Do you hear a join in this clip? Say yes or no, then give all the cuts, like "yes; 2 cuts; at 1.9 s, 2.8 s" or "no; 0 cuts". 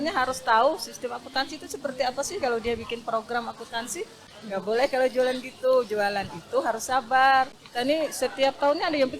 yes; 2 cuts; at 4.3 s, 7.5 s